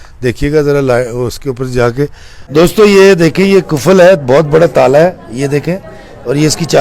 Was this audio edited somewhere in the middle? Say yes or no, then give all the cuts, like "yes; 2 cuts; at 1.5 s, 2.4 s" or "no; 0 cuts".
yes; 1 cut; at 2.4 s